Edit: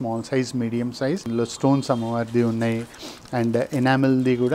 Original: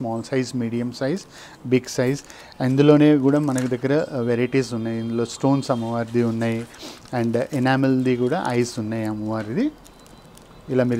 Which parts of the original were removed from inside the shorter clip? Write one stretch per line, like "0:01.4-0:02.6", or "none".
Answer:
0:01.3-0:05.1